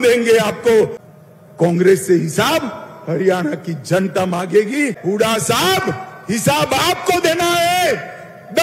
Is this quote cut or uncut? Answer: cut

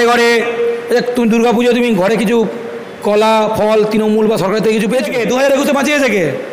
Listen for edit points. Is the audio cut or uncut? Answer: cut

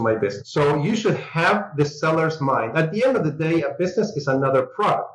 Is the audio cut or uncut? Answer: uncut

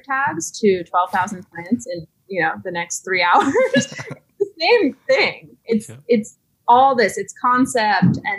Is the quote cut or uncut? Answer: uncut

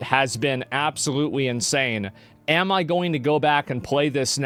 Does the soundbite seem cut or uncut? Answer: uncut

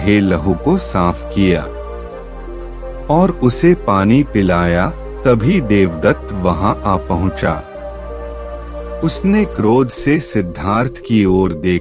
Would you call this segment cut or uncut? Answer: uncut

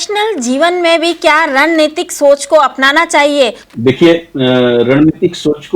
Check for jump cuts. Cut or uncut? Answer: cut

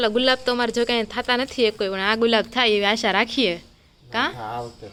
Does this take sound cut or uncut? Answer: uncut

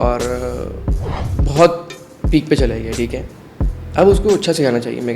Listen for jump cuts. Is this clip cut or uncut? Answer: uncut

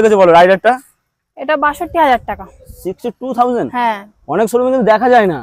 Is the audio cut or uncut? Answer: uncut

